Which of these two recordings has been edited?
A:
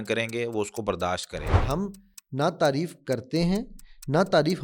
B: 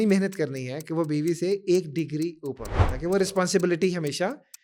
A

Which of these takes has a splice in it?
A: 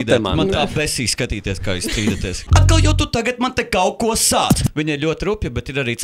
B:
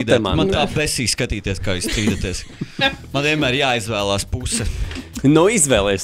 A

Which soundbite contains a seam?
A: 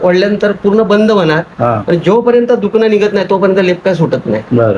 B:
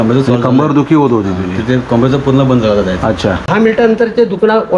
B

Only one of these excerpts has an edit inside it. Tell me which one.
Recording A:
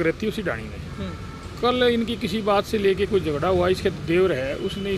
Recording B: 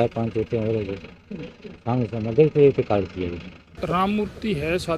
B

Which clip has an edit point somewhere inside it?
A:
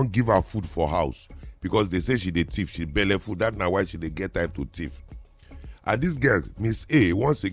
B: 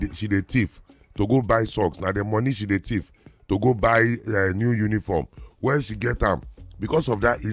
B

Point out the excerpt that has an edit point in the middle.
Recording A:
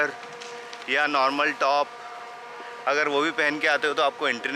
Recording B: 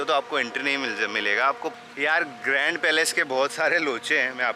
B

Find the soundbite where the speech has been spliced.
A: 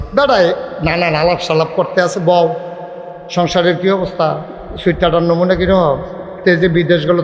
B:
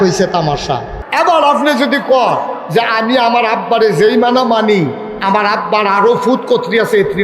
B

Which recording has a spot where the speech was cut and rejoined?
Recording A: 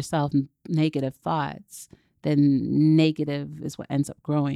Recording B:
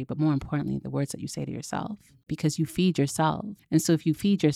B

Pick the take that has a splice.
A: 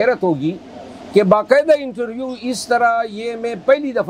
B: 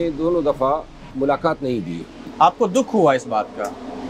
B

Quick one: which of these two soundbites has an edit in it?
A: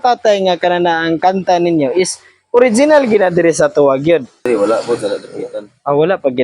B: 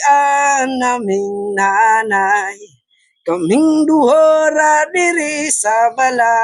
A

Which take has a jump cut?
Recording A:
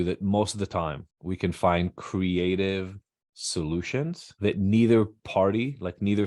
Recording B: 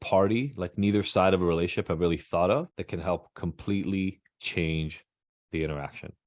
A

